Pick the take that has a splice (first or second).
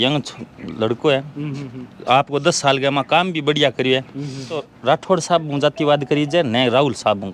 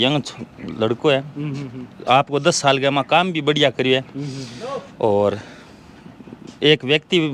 first